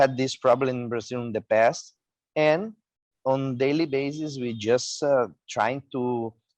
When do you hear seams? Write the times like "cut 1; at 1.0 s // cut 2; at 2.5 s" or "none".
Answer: none